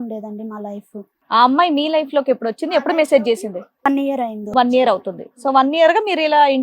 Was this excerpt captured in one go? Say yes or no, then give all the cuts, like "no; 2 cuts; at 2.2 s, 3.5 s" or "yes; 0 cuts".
no; 1 cut; at 1.1 s